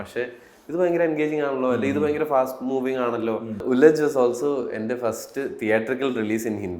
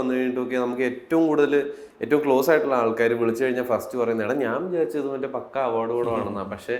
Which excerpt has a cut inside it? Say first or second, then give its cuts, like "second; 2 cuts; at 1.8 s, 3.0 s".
first; 1 cut; at 3.6 s